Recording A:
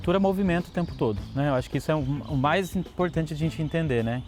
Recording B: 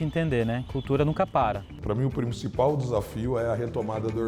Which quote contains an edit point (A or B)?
B